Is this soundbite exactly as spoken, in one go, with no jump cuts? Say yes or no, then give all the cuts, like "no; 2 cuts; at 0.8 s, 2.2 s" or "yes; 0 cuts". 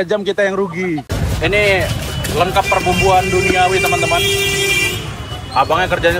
no; 1 cut; at 1.1 s